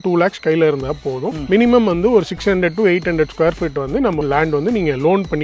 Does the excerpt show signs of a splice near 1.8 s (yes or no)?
no